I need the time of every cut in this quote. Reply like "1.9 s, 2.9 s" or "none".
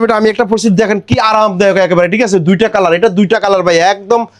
none